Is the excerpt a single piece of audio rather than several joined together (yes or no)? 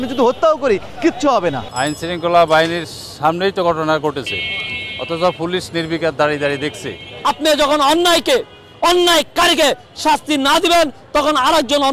no